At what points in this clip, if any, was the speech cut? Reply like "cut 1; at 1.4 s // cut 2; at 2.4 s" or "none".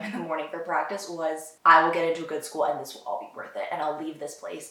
cut 1; at 1.5 s